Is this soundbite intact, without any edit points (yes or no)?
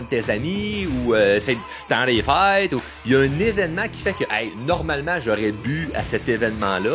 yes